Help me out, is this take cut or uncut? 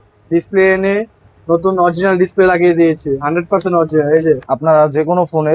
cut